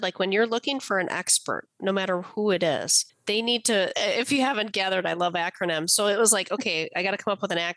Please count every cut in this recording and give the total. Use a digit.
1